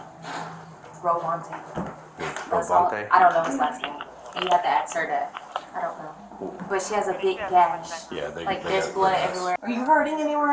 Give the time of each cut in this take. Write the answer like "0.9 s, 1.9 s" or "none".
9.6 s